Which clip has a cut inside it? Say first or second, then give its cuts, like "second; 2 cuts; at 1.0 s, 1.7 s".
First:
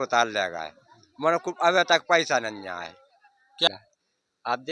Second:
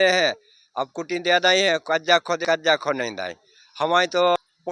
first; 1 cut; at 3.7 s